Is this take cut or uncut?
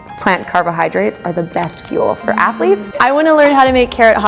cut